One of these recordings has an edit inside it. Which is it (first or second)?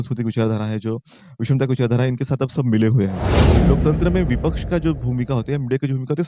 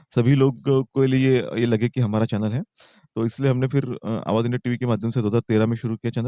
first